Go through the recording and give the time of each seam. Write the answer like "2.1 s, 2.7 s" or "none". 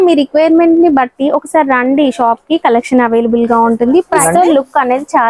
4.2 s